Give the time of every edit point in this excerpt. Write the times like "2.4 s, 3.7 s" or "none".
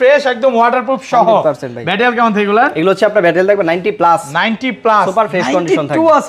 none